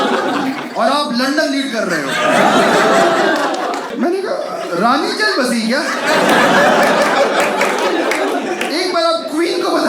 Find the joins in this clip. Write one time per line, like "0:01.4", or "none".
0:03.9